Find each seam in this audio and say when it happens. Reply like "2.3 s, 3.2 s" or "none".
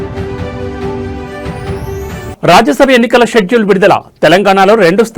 2.3 s